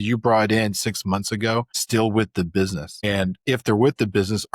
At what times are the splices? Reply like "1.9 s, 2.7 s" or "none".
1.8 s, 3.0 s